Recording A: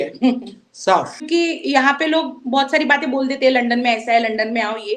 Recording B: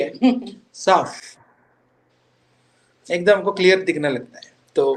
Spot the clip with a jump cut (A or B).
A